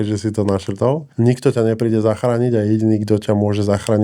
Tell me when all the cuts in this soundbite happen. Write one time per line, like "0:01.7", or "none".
0:01.1